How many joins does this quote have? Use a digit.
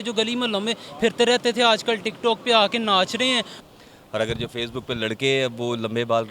1